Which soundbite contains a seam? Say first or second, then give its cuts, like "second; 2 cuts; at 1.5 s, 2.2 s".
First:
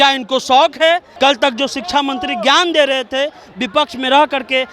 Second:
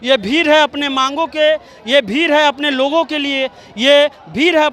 first; 1 cut; at 1.1 s